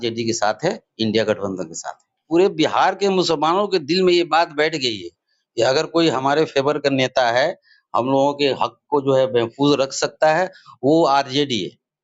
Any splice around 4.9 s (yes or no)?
no